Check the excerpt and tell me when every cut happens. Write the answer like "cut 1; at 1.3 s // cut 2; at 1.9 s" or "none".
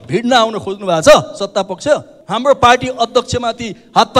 cut 1; at 2.2 s